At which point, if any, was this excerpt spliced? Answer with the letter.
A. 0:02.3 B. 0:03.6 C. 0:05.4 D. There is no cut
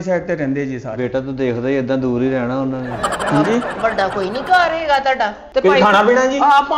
C